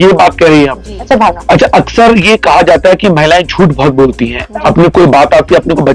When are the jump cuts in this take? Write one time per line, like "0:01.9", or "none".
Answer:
0:00.9